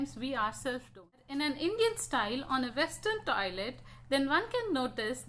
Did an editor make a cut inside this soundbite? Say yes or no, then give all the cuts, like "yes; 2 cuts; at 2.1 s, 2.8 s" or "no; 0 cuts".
yes; 1 cut; at 1.2 s